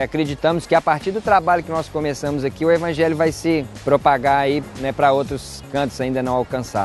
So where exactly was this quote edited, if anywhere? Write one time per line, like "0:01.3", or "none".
0:03.7
0:04.7